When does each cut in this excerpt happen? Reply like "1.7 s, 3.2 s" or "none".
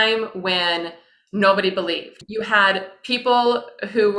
2.2 s